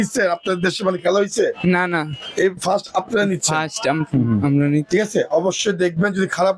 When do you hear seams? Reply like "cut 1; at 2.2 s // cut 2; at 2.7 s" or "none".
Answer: none